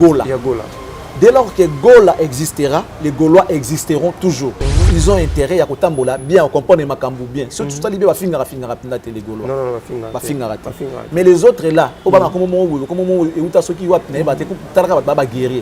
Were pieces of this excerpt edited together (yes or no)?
yes